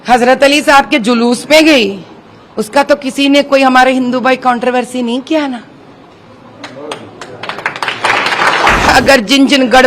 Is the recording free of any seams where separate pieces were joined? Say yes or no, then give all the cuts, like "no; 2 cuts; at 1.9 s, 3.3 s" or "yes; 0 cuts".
no; 1 cut; at 8.9 s